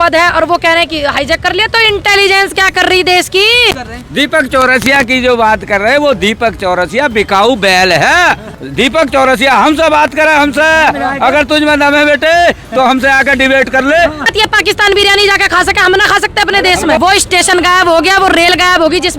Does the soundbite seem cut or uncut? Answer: cut